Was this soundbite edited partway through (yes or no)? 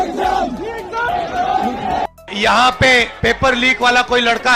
yes